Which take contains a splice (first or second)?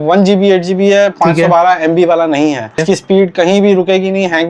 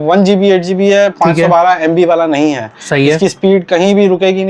first